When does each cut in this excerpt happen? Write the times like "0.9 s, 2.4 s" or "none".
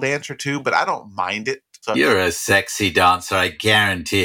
1.7 s